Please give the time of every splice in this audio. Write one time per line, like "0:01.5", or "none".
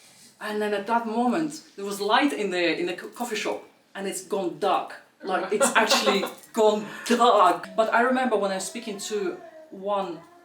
0:07.7